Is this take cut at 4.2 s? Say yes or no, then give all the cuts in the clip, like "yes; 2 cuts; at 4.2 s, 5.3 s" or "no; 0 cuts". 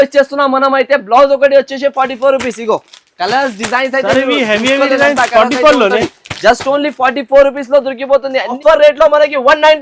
no; 1 cut; at 8.6 s